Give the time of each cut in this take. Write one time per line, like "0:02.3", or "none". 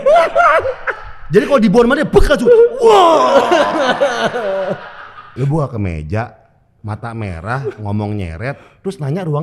0:05.2